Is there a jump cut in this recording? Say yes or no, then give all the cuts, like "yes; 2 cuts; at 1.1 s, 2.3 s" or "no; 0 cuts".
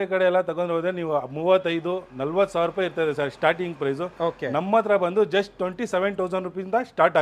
no; 0 cuts